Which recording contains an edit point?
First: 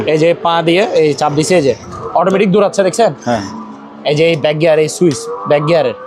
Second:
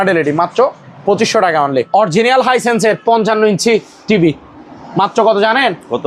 second; 1 cut; at 1.9 s

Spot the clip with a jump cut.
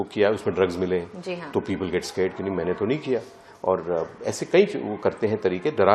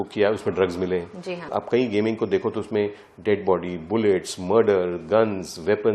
second; 1 cut; at 1.4 s

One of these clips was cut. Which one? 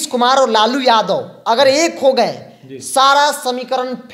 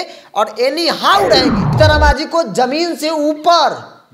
second; 1 cut; at 1.7 s

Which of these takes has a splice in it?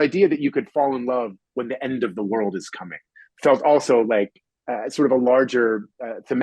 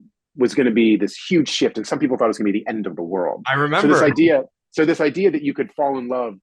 second; 1 cut; at 1.2 s

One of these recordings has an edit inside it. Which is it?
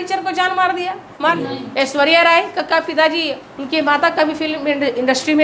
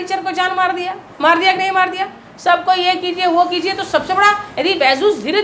first; 1 cut; at 1.3 s

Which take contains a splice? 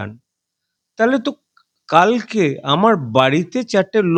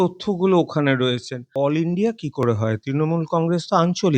second; 1 cut; at 1.5 s

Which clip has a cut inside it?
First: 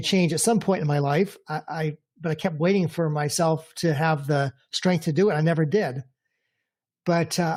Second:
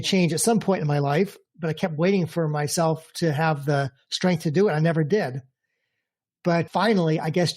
second; 2 cuts; at 1.4 s, 6.7 s

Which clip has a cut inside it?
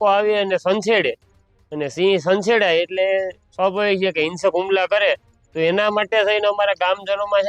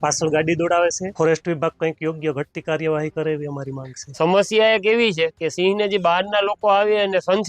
second; 2 cuts; at 1.0 s, 4.1 s

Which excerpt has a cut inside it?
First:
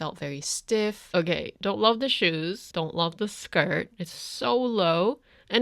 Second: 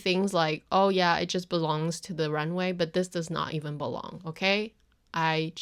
first; 2 cuts; at 1.0 s, 2.6 s

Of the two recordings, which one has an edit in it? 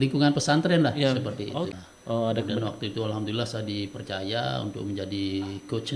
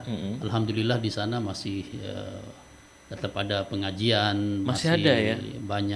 first; 1 cut; at 1.7 s

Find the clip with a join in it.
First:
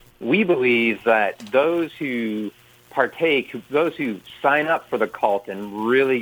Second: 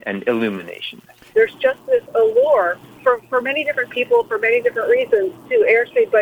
second; 2 cuts; at 1.3 s, 2.8 s

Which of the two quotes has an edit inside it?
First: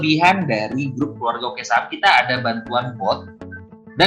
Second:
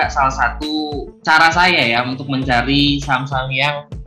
second; 1 cut; at 1.1 s

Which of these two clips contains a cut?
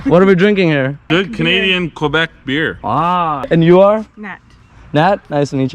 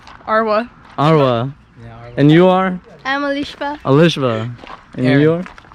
first; 2 cuts; at 1.0 s, 3.5 s

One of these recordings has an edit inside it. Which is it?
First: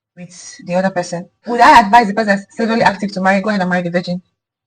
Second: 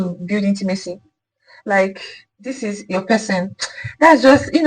first; 1 cut; at 1.3 s

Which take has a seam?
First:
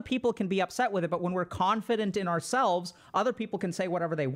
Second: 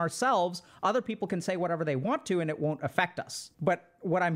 second; 1 cut; at 3.4 s

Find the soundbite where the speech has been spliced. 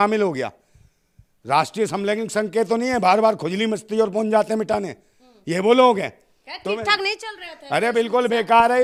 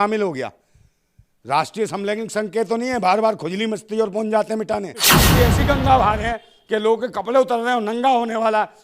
second; 1 cut; at 5.2 s

